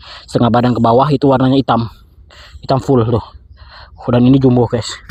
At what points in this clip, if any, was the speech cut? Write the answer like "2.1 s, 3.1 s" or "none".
none